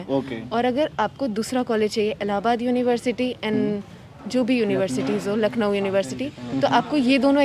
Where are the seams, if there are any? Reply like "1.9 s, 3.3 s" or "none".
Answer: none